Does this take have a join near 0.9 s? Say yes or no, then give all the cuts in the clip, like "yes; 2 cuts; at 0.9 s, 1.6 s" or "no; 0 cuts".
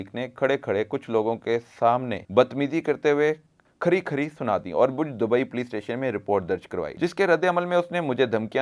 no; 2 cuts; at 2.2 s, 6.9 s